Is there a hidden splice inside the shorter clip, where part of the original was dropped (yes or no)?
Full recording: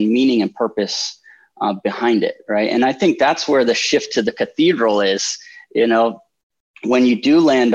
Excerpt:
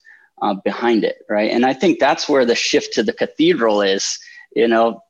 no